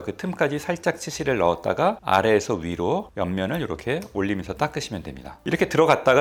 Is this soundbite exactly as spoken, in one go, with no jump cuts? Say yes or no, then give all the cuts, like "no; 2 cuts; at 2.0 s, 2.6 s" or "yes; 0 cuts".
yes; 0 cuts